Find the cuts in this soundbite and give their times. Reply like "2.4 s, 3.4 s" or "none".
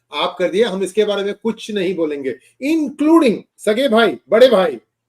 3.5 s